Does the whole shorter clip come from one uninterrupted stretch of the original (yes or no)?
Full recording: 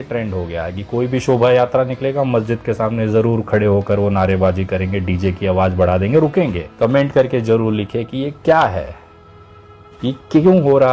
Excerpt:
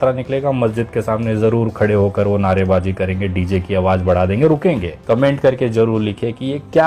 yes